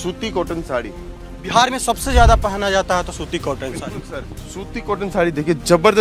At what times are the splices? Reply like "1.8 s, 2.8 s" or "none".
none